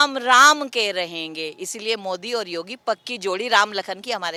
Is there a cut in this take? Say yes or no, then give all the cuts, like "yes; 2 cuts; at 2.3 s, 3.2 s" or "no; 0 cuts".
no; 0 cuts